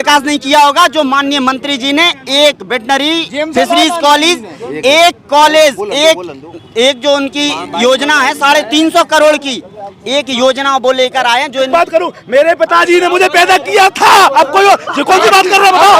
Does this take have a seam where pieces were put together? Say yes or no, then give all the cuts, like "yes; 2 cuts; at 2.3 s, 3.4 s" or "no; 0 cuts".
yes; 1 cut; at 11.7 s